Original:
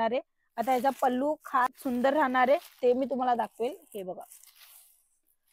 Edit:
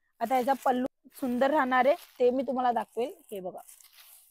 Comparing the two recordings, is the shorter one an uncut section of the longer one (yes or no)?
no